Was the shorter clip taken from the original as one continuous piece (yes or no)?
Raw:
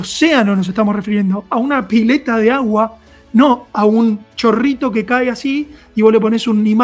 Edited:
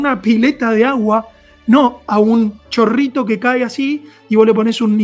yes